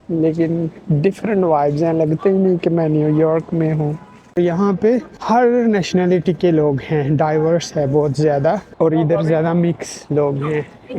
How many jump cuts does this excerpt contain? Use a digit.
2